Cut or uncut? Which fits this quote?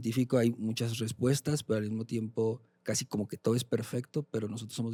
uncut